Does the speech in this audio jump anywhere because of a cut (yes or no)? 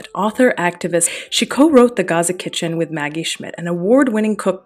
yes